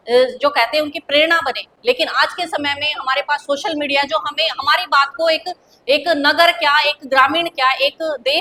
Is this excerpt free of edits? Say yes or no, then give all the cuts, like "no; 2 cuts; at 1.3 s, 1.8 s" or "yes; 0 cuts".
yes; 0 cuts